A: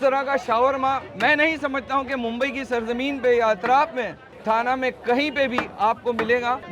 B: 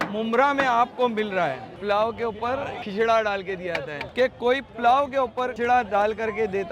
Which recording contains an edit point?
B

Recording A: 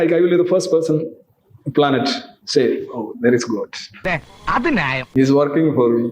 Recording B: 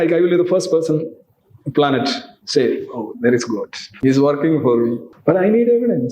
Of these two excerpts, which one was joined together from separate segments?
B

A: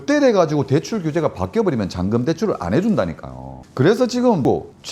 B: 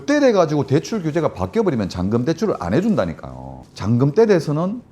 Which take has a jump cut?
B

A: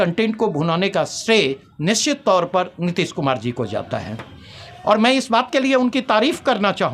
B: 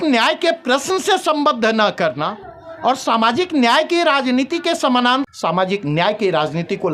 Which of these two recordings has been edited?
B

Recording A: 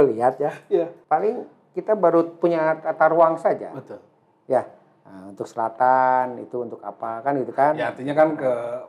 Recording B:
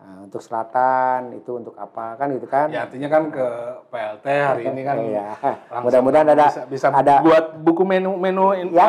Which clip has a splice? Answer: A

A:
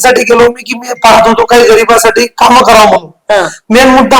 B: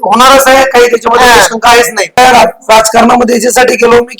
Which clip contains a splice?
B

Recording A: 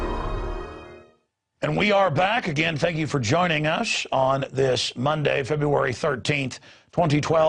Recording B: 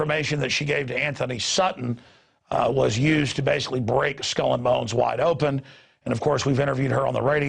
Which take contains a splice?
B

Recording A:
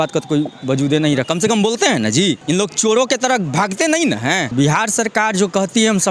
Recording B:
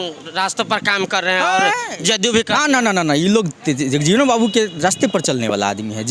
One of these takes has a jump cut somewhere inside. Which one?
A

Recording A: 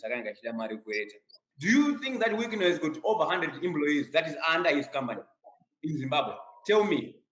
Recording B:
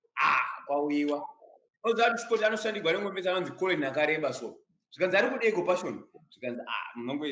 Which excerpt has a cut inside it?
A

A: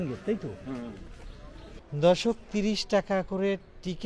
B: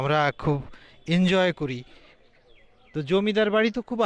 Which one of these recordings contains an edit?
A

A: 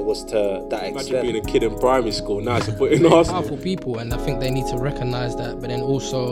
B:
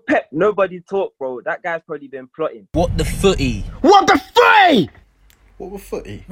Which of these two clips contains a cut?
B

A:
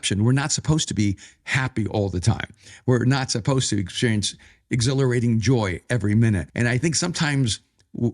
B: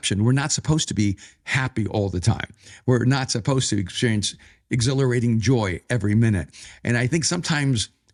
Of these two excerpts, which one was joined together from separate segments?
A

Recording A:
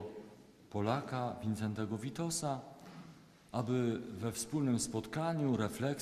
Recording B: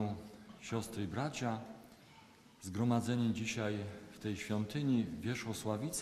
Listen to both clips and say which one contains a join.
A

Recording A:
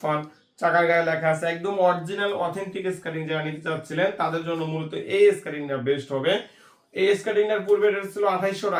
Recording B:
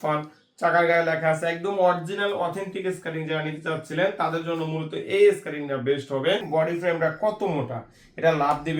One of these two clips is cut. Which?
B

